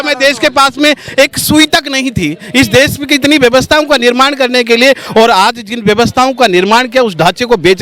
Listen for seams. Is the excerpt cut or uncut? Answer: uncut